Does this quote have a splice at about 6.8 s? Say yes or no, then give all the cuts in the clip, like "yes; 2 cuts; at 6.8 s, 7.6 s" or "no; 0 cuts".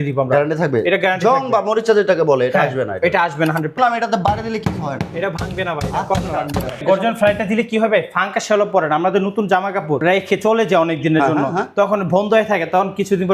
yes; 3 cuts; at 3.8 s, 6.8 s, 10.0 s